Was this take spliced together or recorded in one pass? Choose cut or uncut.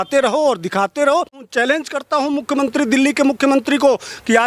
cut